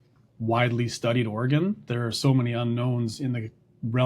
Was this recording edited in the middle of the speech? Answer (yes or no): yes